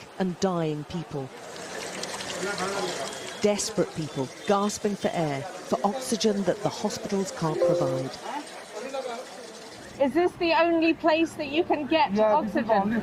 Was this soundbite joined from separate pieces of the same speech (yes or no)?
no